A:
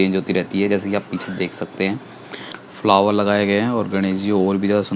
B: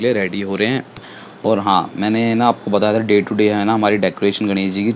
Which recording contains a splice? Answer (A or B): B